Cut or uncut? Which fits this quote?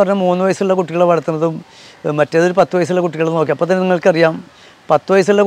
uncut